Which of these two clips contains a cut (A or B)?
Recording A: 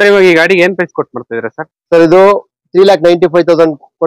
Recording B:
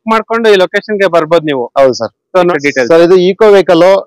B